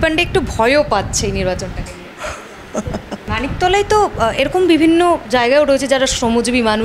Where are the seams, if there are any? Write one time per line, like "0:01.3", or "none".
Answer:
0:03.2